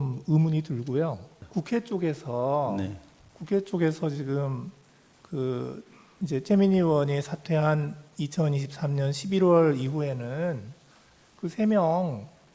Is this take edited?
yes; 1 cut; at 1.4 s

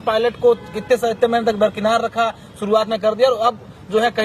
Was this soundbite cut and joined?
no; 0 cuts

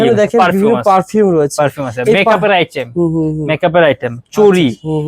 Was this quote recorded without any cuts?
yes; 0 cuts

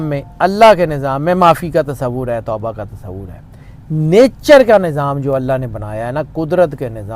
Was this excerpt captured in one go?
yes; 0 cuts

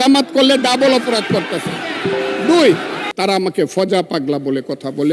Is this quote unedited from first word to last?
no; 1 cut; at 3.0 s

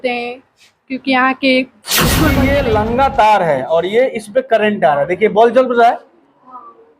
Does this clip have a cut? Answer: yes; 1 cut; at 2.3 s

